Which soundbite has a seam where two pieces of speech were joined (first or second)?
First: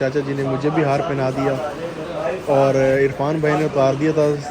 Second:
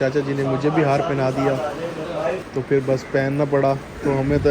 second